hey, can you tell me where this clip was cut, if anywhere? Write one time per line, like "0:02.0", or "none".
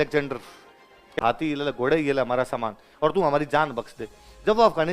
0:01.2